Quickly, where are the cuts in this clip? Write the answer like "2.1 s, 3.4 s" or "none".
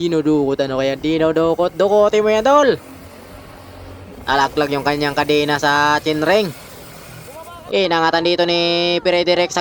7.6 s